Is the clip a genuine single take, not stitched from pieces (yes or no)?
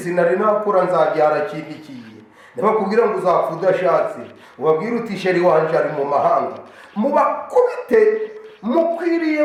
yes